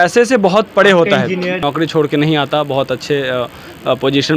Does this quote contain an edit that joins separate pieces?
yes; 1 cut; at 1.6 s

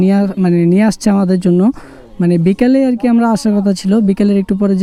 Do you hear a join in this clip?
no; 0 cuts

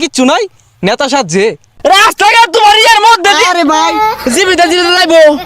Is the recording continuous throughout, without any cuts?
no; 1 cut; at 1.6 s

